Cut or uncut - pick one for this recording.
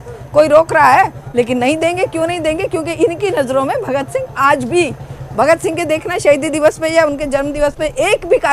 uncut